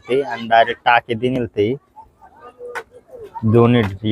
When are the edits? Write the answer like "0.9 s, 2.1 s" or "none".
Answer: none